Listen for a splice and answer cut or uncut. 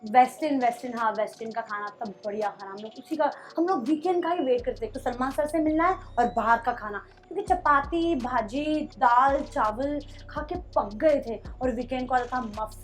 uncut